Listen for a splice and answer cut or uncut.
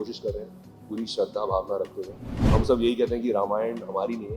cut